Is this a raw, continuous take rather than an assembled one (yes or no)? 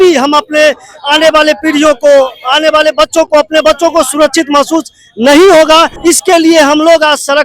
no